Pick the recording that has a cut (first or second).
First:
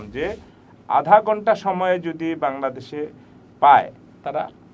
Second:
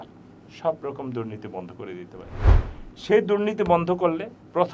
second